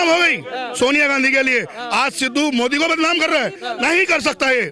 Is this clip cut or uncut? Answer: uncut